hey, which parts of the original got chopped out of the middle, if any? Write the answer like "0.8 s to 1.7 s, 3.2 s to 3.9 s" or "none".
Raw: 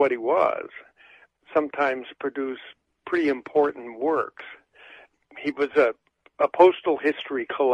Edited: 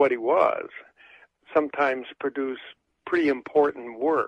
none